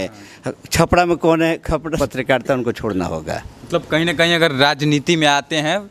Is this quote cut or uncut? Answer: cut